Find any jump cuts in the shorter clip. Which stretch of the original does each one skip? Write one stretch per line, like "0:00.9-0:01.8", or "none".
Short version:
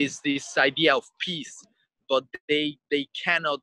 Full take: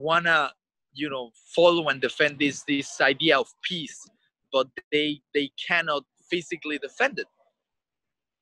none